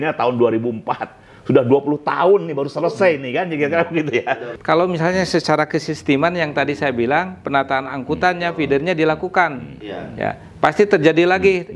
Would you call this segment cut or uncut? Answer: cut